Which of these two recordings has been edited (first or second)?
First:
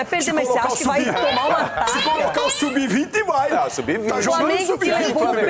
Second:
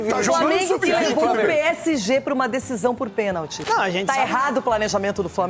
second